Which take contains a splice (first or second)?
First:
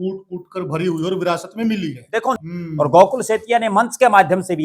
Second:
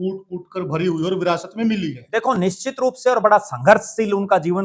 first